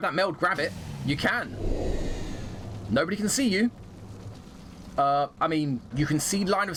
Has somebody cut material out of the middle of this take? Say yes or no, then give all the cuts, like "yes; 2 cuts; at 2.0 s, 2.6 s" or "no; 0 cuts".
no; 0 cuts